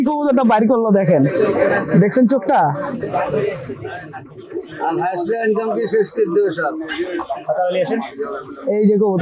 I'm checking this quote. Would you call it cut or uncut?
uncut